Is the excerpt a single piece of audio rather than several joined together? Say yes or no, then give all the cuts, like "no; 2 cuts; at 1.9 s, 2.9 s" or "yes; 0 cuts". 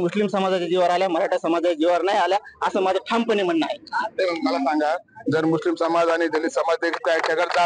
yes; 0 cuts